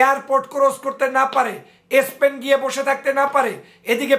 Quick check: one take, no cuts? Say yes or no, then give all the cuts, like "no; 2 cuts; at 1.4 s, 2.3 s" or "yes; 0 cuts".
yes; 0 cuts